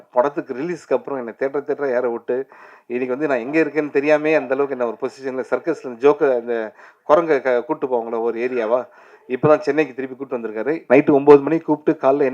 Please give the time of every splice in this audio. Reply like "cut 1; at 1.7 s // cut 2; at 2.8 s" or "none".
cut 1; at 10.8 s